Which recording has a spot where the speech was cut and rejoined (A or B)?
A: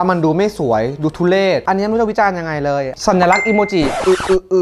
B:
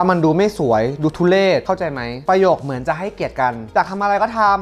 A